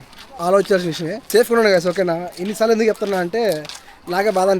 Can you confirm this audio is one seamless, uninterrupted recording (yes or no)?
no